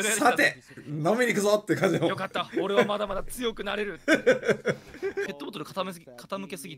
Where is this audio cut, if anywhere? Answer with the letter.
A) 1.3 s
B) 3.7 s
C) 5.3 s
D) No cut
C